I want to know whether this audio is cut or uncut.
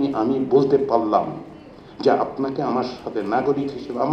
uncut